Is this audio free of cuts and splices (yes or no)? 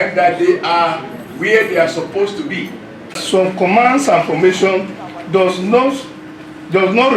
no